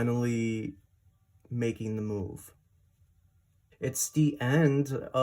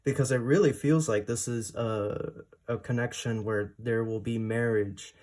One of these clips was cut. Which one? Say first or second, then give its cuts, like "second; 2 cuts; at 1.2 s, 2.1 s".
first; 1 cut; at 3.6 s